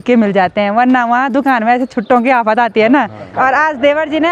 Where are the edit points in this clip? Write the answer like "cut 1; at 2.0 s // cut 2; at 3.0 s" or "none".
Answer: cut 1; at 3.2 s

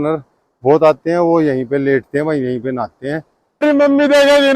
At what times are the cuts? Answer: cut 1; at 3.6 s

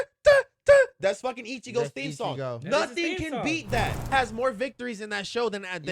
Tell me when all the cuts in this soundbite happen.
cut 1; at 4.1 s

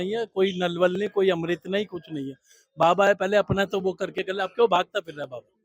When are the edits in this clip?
none

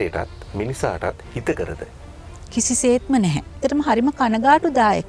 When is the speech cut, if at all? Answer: cut 1; at 3.6 s

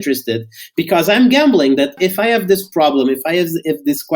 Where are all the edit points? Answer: cut 1; at 1.9 s

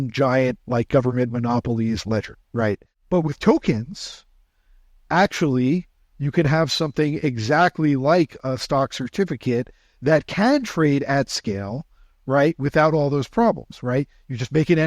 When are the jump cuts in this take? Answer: cut 1; at 2.9 s

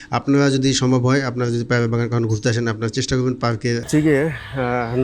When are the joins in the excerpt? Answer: cut 1; at 3.9 s

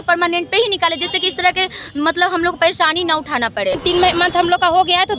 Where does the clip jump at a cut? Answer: cut 1; at 3.8 s

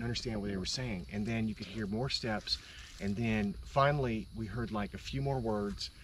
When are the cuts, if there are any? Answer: none

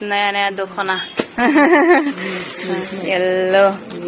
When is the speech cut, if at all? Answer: none

